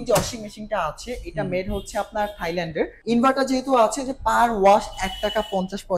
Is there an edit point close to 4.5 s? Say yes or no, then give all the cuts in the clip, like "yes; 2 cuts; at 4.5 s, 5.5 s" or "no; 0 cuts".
no; 1 cut; at 3.0 s